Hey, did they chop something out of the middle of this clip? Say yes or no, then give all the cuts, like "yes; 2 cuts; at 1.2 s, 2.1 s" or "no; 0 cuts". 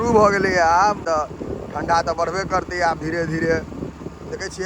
no; 0 cuts